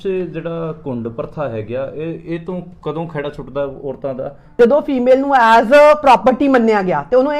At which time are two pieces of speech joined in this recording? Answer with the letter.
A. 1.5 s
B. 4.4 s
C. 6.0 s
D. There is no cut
B